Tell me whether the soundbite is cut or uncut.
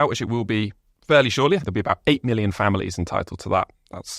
cut